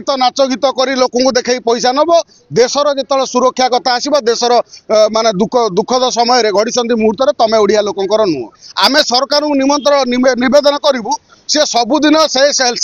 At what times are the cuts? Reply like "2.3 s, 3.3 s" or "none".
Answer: 8.6 s